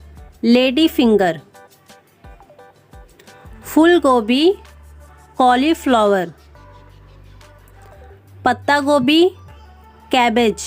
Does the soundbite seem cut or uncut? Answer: uncut